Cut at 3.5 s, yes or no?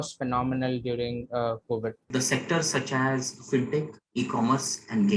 no